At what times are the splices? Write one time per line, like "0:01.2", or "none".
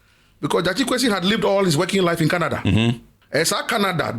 0:03.1